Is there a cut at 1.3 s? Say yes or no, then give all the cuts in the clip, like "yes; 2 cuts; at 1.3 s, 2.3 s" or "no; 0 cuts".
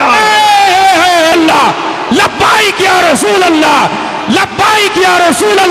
yes; 1 cut; at 1.3 s